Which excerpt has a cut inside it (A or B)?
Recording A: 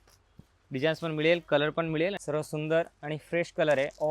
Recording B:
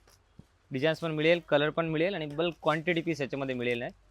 A